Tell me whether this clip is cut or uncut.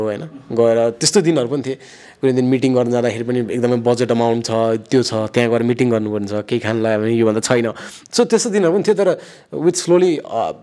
uncut